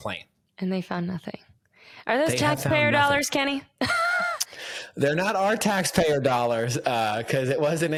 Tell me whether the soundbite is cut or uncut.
uncut